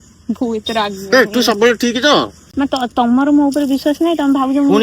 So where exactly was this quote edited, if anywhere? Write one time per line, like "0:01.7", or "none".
0:02.4